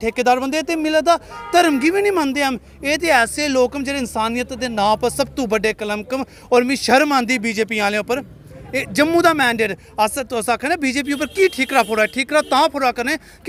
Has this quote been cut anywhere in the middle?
no; 0 cuts

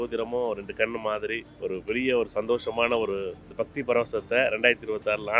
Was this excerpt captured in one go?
no; 2 cuts; at 1.5 s, 3.4 s

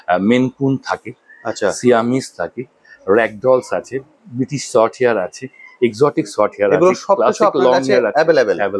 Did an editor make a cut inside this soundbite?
no; 0 cuts

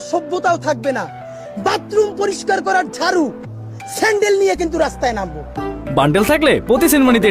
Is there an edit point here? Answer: no; 0 cuts

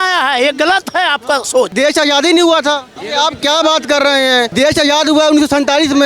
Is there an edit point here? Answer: yes; 3 cuts; at 1.7 s, 2.9 s, 4.5 s

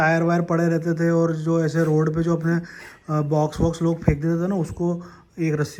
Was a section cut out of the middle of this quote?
no; 0 cuts

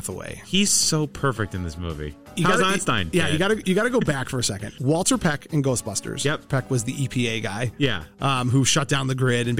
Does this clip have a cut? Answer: yes; 3 cuts; at 2.2 s, 4.7 s, 6.4 s

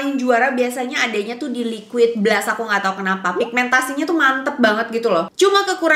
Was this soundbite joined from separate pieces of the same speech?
no; 0 cuts

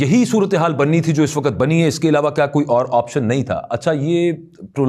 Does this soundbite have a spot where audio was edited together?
no; 0 cuts

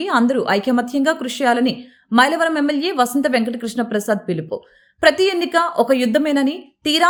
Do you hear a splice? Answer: no; 0 cuts

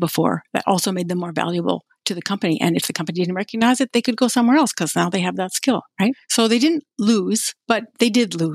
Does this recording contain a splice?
yes; 2 cuts; at 6.2 s, 7.5 s

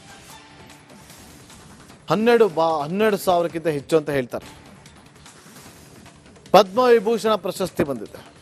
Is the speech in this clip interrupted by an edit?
no; 0 cuts

